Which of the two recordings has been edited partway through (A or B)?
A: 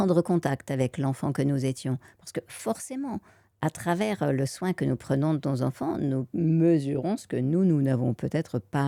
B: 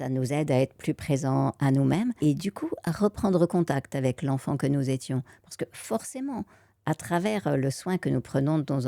B